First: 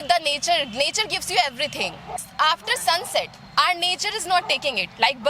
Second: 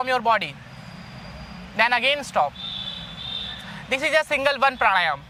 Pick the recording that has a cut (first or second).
first